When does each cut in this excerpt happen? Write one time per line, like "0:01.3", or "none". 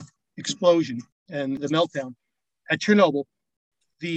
0:01.5